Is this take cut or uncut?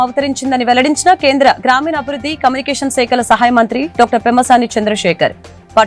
uncut